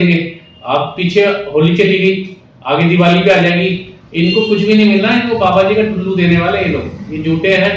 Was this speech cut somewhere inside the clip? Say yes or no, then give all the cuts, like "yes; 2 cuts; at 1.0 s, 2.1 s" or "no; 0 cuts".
no; 0 cuts